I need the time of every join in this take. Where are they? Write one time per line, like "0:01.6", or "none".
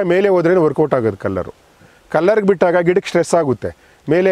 none

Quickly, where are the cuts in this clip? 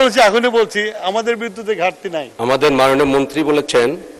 0:02.3

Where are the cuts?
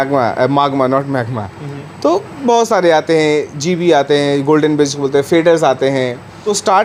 none

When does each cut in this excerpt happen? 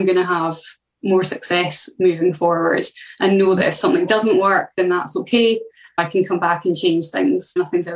none

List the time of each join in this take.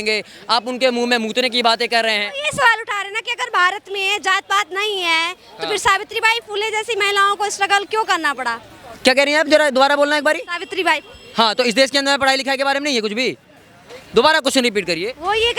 none

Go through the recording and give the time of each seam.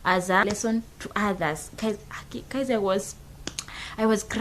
none

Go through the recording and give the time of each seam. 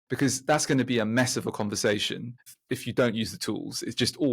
0:02.4

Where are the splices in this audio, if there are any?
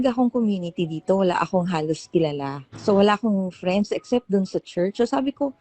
0:02.7

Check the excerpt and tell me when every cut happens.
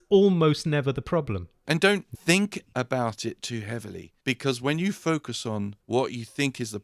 0:01.6

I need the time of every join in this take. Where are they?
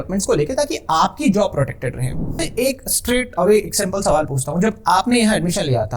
0:02.4

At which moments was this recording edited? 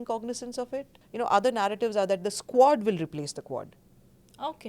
0:01.0

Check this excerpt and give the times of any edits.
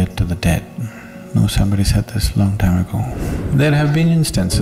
0:03.1

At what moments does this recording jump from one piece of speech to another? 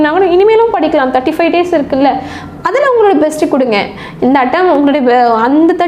none

